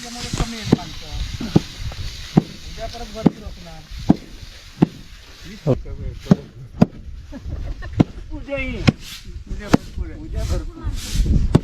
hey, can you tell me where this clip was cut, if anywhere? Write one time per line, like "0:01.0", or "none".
0:05.7